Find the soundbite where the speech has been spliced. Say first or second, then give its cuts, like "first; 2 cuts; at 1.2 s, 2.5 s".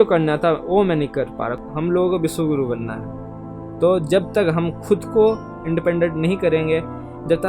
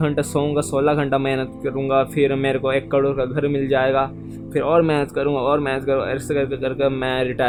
first; 1 cut; at 1.7 s